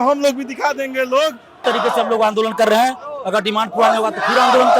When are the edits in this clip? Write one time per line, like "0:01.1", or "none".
0:01.5